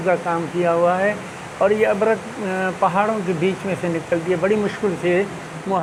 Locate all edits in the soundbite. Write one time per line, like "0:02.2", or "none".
none